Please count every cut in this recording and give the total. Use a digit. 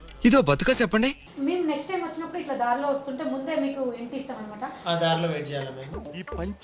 1